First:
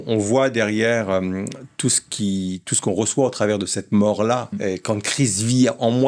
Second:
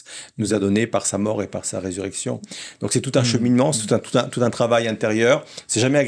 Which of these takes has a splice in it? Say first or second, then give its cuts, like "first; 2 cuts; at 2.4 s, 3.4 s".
first; 1 cut; at 4.5 s